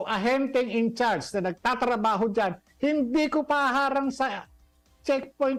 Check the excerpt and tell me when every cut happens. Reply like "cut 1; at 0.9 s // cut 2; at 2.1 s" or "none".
none